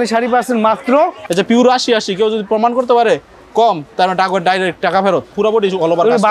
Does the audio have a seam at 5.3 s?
yes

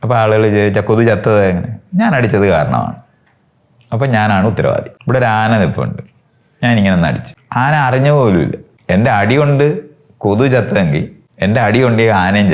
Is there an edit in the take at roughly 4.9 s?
yes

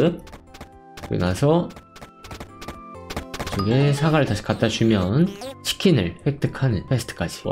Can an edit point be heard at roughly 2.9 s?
yes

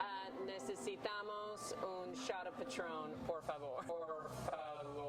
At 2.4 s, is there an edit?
no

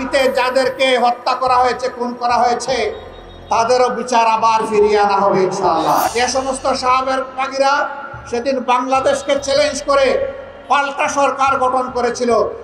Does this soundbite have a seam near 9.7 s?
no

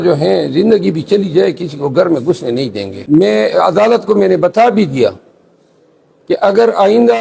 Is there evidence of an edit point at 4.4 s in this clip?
no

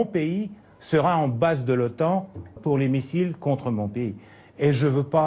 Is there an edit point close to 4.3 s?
no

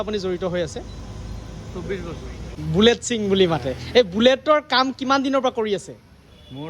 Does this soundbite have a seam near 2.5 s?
yes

